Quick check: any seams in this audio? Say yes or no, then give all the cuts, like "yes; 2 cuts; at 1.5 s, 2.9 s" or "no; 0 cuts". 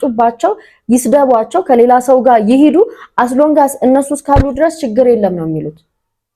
no; 0 cuts